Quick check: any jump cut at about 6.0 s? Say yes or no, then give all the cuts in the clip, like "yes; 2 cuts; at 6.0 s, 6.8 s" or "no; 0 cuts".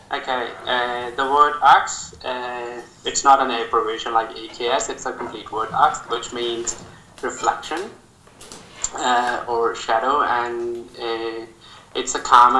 yes; 1 cut; at 6.0 s